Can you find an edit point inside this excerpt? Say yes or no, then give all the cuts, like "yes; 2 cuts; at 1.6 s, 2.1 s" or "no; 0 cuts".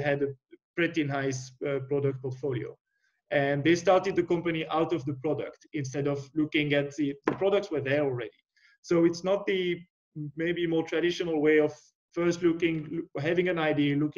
no; 0 cuts